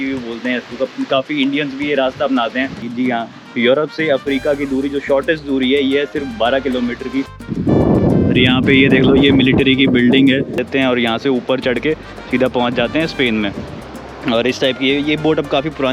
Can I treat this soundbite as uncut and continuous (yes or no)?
no